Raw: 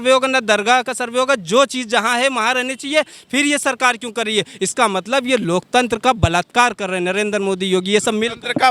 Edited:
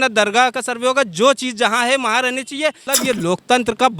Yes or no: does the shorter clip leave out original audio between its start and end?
yes